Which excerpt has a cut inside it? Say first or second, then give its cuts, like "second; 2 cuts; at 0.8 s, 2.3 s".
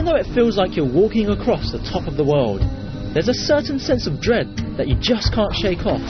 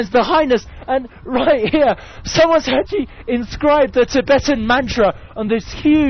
first; 1 cut; at 1.1 s